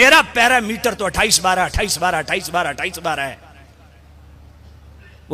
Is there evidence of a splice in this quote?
no; 0 cuts

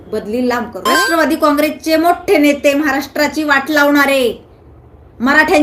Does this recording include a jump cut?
yes; 1 cut; at 1.0 s

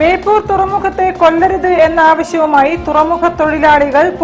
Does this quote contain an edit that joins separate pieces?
no; 0 cuts

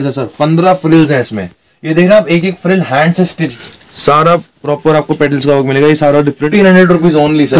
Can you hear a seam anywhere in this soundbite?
yes; 2 cuts; at 3.6 s, 6.4 s

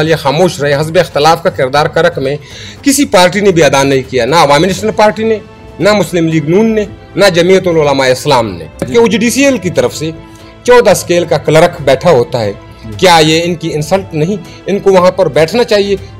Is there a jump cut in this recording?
yes; 1 cut; at 8.9 s

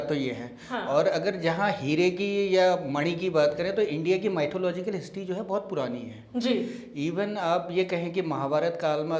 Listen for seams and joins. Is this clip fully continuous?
yes; 0 cuts

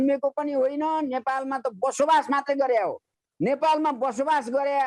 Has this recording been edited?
no; 0 cuts

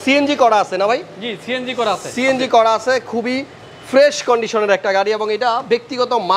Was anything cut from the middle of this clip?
no; 0 cuts

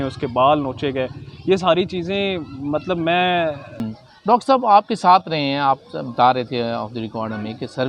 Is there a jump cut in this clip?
yes; 1 cut; at 3.8 s

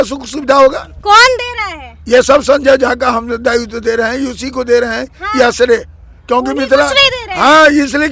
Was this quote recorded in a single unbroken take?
yes; 0 cuts

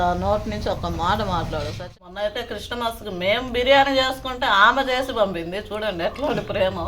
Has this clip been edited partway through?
yes; 1 cut; at 1.8 s

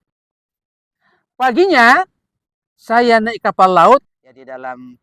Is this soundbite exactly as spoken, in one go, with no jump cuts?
no; 1 cut; at 4.1 s

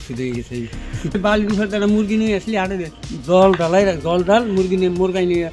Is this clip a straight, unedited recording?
no; 1 cut; at 1.1 s

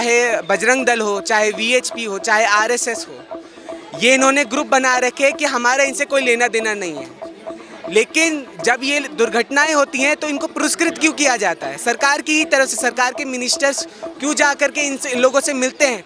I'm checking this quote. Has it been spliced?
no; 0 cuts

